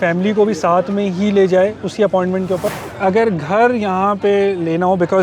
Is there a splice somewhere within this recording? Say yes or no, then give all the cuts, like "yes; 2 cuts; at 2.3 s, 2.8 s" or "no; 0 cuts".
yes; 1 cut; at 2.8 s